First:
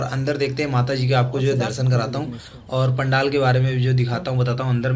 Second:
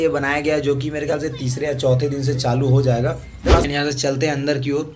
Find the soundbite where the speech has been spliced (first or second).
second